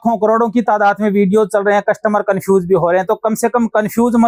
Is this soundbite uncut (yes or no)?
yes